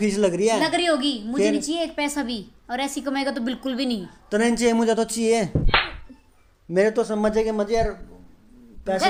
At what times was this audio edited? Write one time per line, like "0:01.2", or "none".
none